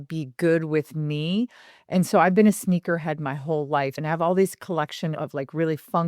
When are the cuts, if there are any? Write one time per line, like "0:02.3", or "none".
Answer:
0:04.0
0:05.1